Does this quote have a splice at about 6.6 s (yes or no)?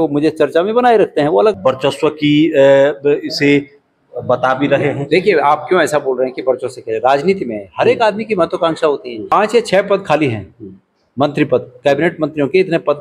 no